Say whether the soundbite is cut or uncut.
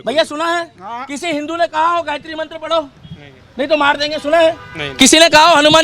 uncut